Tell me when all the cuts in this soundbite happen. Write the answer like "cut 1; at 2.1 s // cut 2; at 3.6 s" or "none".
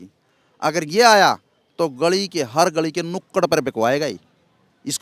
none